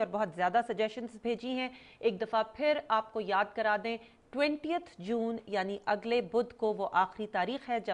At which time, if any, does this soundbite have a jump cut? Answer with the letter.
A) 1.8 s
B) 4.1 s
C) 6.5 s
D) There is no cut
B